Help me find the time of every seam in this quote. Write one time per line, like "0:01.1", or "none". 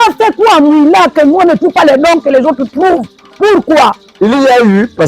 0:04.0